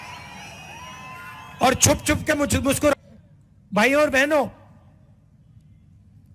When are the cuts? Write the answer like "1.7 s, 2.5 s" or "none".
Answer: 2.9 s

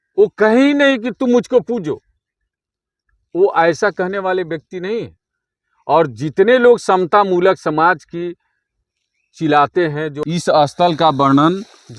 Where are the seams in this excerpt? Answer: 10.1 s

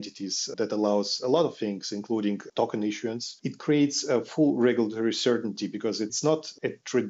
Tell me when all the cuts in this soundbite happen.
2.5 s, 3.3 s, 6.1 s

